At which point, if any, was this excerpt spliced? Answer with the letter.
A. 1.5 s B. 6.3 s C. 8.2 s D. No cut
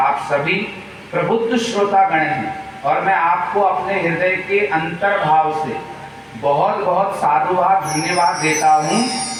D